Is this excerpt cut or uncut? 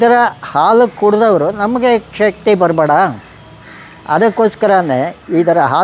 uncut